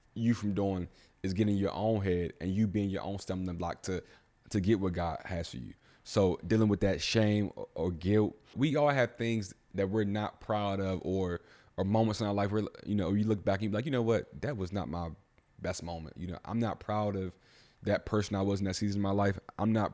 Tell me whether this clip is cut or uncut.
cut